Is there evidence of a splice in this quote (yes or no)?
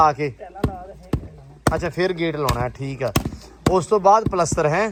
no